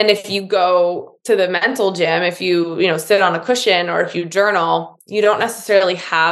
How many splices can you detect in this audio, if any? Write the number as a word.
one